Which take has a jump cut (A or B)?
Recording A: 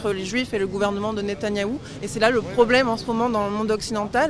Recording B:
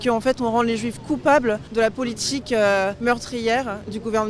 B